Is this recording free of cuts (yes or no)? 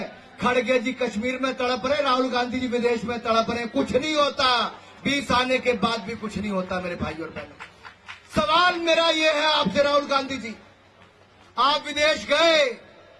yes